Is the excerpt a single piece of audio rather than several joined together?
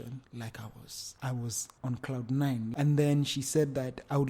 no; 2 cuts; at 1.0 s, 2.7 s

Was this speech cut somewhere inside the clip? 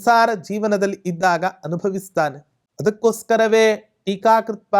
no; 0 cuts

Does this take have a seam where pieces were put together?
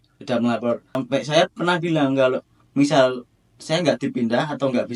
yes; 1 cut; at 1.0 s

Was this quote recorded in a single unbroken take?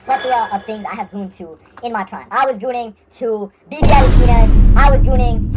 no; 1 cut; at 2.3 s

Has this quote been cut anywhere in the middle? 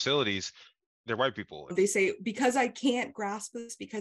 yes; 1 cut; at 1.1 s

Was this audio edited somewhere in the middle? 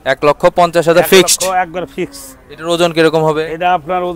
no; 0 cuts

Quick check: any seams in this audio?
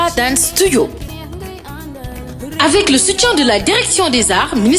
yes; 1 cut; at 1.1 s

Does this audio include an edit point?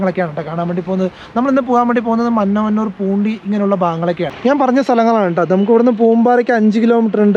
yes; 1 cut; at 4.3 s

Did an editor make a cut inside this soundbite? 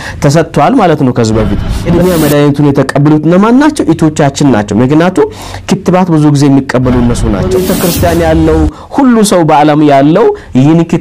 yes; 2 cuts; at 1.6 s, 7.4 s

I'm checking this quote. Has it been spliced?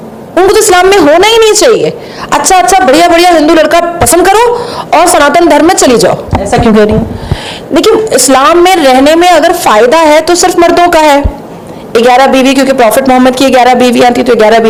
no; 0 cuts

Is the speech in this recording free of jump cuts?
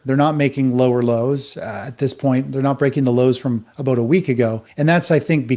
yes; 0 cuts

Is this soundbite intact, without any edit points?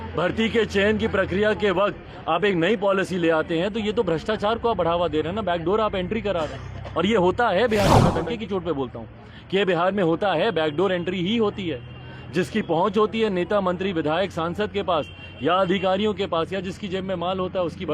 no; 1 cut; at 8.1 s

